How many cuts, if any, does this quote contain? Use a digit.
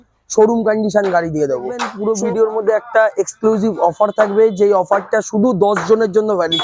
1